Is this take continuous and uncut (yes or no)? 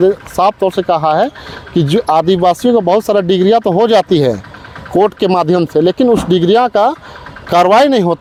yes